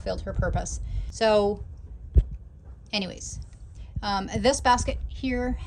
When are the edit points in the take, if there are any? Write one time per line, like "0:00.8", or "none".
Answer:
none